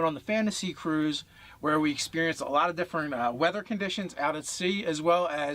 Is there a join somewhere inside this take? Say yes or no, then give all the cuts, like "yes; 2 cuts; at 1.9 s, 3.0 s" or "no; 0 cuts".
yes; 1 cut; at 2.6 s